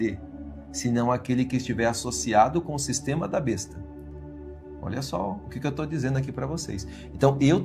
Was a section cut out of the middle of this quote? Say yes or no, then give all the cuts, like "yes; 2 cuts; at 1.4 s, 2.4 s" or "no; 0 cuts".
no; 0 cuts